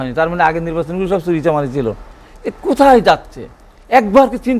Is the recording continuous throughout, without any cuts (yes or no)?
yes